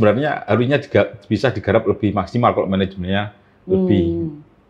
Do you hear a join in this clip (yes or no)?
no